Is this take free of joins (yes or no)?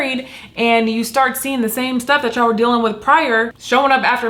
yes